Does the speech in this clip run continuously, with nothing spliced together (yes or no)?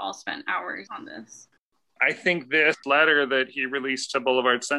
no